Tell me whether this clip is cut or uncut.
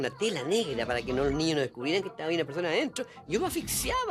uncut